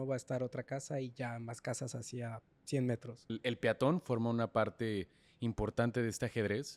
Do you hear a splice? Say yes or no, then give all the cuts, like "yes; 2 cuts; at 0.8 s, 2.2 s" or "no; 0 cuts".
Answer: yes; 1 cut; at 3.3 s